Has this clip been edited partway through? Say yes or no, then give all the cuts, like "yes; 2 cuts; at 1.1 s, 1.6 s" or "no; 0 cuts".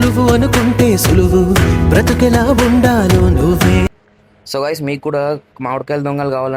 no; 0 cuts